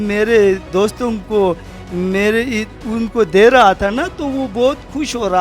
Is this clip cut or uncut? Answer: uncut